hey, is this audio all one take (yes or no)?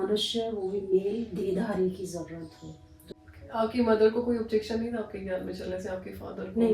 no